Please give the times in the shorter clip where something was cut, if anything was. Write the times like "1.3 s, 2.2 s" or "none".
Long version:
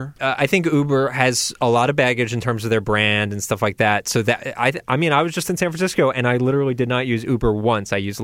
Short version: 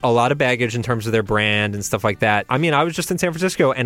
2.5 s